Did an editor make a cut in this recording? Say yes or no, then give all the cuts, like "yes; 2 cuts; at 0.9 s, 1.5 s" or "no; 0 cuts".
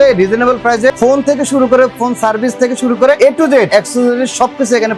yes; 1 cut; at 3.7 s